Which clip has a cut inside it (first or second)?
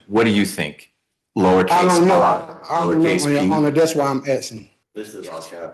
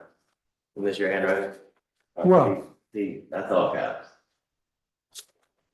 first